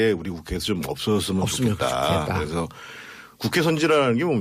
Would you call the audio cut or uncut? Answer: cut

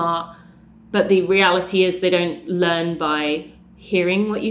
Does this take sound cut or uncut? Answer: uncut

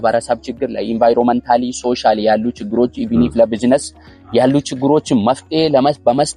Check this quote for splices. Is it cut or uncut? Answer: uncut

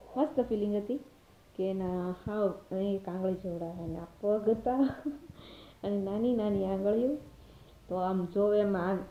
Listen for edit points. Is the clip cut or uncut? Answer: uncut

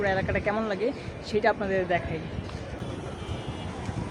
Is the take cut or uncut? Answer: uncut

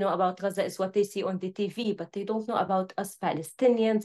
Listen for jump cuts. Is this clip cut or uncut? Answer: uncut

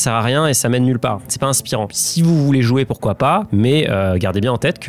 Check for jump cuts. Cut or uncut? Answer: cut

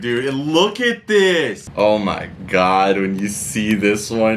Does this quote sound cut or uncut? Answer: cut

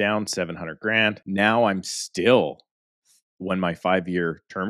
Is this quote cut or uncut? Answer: cut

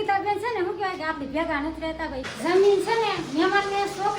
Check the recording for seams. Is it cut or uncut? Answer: cut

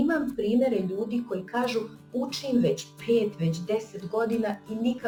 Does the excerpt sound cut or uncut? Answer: uncut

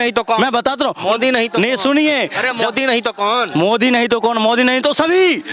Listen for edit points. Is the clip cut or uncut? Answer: uncut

